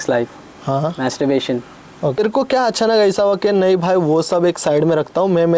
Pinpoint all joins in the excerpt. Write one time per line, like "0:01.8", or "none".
0:02.2